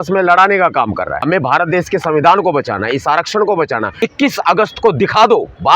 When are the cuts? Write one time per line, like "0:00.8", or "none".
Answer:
0:01.2
0:03.9